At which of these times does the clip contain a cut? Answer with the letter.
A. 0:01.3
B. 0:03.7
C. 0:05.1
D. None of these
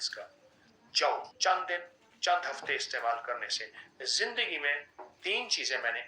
A